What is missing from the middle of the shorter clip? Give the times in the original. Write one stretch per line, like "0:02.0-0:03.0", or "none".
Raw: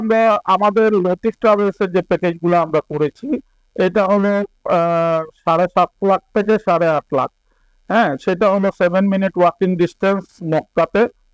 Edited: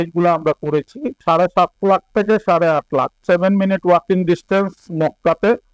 0:03.4-0:05.3
0:07.4-0:08.7